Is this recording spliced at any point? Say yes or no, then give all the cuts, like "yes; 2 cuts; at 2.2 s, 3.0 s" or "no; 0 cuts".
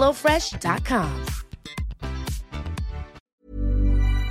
yes; 1 cut; at 3.2 s